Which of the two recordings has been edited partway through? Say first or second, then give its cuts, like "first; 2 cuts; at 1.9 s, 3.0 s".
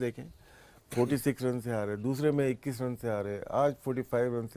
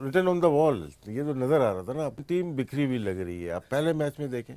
second; 1 cut; at 2.2 s